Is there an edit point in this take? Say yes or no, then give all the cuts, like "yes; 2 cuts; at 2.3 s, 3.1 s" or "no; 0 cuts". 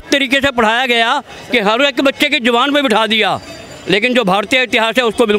no; 0 cuts